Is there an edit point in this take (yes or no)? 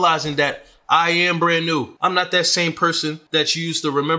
yes